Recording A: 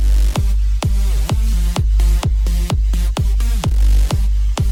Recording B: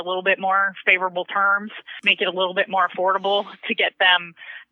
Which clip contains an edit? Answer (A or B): B